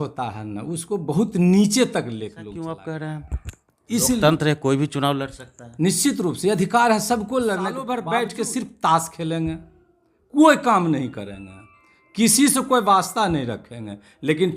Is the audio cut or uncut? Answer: cut